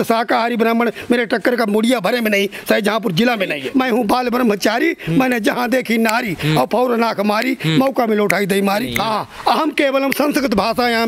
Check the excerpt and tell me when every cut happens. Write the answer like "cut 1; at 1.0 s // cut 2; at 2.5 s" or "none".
cut 1; at 3.6 s // cut 2; at 8.9 s